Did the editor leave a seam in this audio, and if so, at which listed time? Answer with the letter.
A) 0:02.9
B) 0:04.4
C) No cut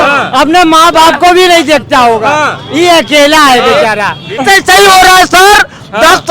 B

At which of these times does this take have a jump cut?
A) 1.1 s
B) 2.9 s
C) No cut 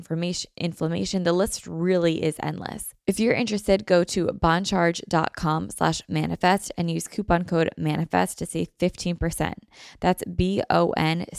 B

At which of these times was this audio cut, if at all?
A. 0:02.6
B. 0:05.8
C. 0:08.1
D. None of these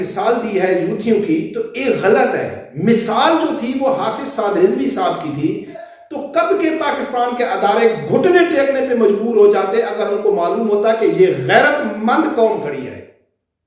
B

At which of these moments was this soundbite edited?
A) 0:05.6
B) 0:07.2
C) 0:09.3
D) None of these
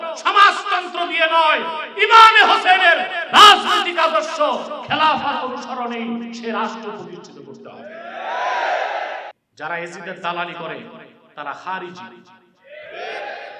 C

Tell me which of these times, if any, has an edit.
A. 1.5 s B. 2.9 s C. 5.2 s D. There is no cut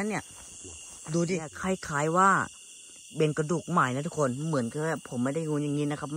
A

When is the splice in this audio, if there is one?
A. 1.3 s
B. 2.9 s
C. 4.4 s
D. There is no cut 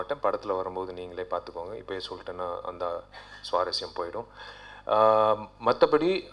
D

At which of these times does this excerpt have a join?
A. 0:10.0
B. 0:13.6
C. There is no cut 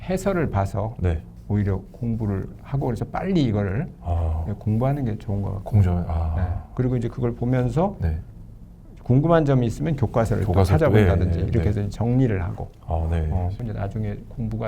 B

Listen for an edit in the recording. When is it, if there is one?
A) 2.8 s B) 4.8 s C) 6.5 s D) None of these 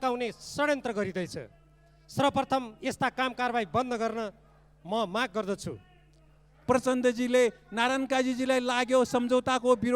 C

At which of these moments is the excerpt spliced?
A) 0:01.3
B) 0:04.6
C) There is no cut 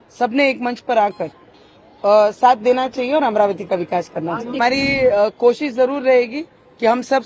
B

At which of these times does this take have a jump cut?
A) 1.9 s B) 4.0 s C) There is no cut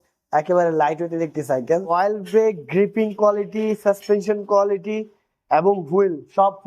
A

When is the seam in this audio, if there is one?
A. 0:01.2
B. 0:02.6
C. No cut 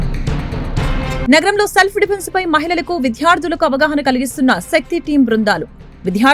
A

